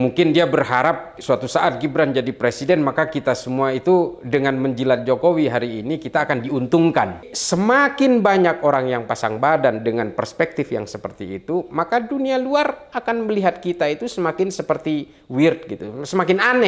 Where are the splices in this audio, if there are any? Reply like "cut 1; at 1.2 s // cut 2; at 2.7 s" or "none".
cut 1; at 1.2 s // cut 2; at 7.3 s